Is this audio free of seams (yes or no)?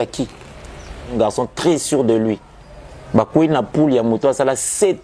no